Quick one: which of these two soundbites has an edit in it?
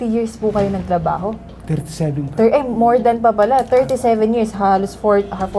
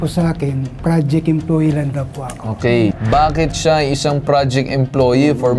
second; 1 cut; at 3.0 s

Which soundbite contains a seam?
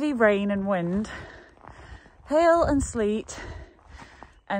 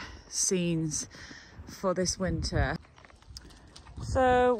second; 1 cut; at 2.8 s

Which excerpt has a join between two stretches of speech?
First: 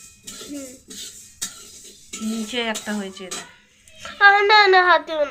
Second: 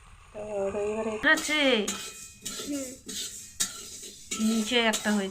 second; 1 cut; at 1.2 s

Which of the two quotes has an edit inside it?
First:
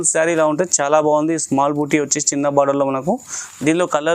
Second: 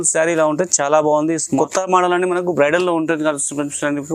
second; 1 cut; at 1.5 s

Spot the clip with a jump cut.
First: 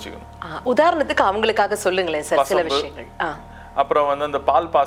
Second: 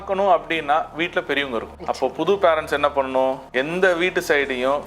second; 2 cuts; at 1.7 s, 3.4 s

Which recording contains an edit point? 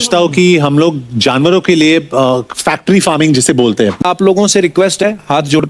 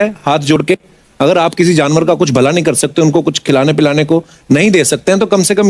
first; 1 cut; at 4.0 s

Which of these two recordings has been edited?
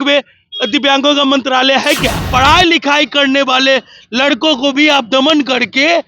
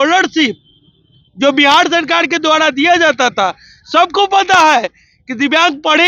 first; 1 cut; at 2.2 s

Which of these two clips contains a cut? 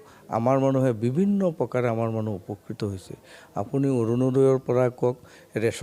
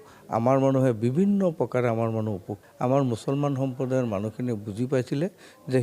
second; 1 cut; at 2.6 s

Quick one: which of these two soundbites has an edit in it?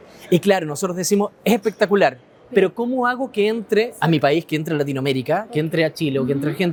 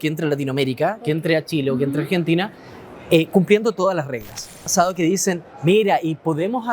second; 1 cut; at 4.7 s

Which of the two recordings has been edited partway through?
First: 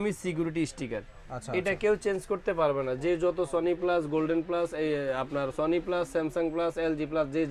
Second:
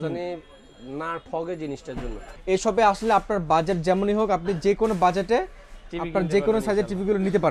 second; 1 cut; at 2.3 s

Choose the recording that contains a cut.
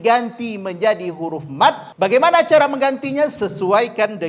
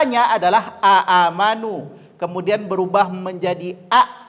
first; 1 cut; at 1.9 s

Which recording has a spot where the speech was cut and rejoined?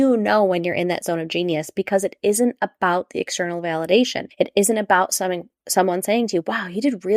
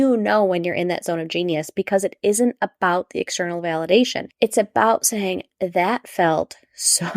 second; 1 cut; at 4.2 s

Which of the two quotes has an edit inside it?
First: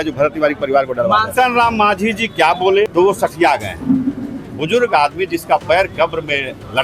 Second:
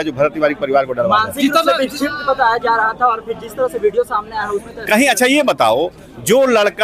first; 2 cuts; at 1.3 s, 2.9 s

